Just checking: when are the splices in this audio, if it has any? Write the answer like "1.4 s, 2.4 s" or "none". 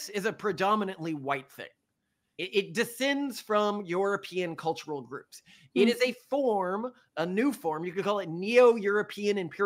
2.3 s